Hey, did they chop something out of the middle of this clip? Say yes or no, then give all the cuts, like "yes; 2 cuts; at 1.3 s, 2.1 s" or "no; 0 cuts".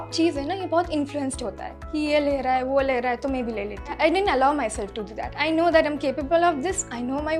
yes; 2 cuts; at 3.9 s, 5.3 s